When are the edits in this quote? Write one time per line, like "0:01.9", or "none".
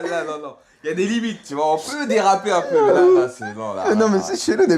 0:01.9